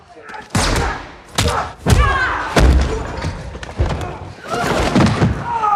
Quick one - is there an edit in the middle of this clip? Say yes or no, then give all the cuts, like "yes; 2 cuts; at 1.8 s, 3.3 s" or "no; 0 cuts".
no; 0 cuts